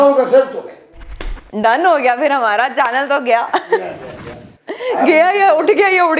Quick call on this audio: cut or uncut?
uncut